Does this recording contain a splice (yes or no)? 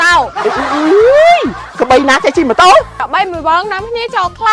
yes